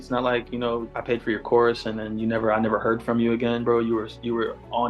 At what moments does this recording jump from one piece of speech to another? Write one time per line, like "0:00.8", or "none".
0:00.9